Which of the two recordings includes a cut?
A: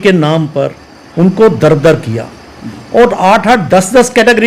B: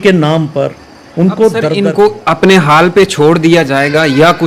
B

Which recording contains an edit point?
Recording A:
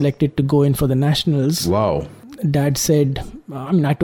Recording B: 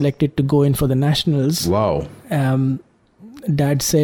A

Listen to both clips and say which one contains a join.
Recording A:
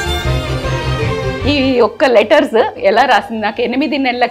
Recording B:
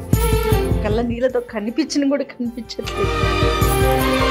A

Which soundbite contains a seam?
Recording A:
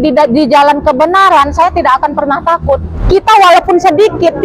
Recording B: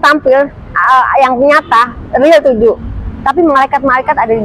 A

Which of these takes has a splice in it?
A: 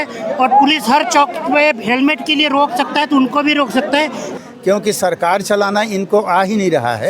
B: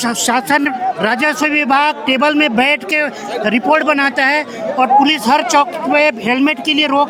A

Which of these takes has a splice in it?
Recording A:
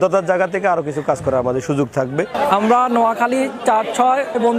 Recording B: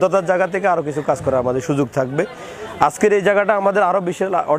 A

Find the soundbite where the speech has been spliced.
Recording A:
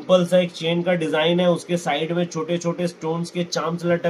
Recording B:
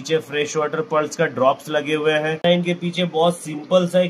B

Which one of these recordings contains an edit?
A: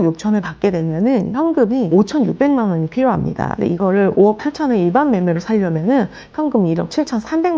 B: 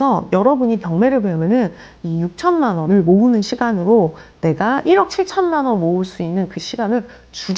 A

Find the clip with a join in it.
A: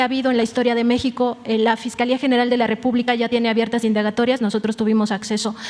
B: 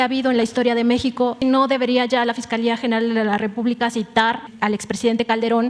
B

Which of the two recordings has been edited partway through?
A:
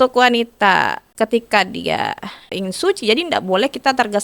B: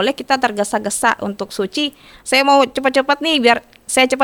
A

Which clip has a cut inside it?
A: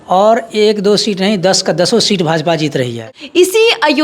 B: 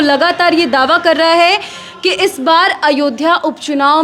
A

